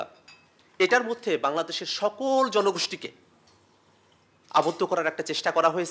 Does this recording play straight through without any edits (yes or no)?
yes